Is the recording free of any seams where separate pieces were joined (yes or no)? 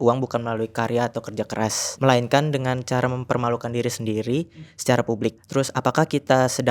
no